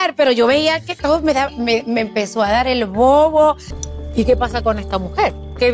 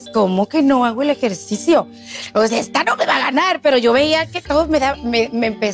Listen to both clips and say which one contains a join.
first; 1 cut; at 3.7 s

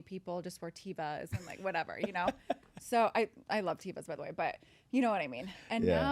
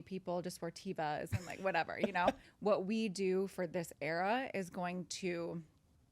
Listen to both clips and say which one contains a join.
second; 1 cut; at 2.4 s

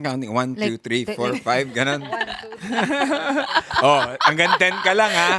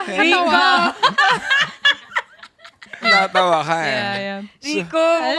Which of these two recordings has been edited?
second; 1 cut; at 3.0 s

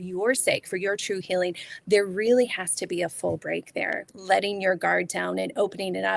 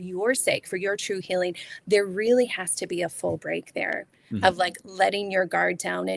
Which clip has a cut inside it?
first; 1 cut; at 4.1 s

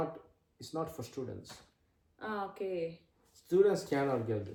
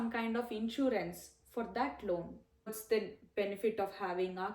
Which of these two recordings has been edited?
second; 1 cut; at 2.7 s

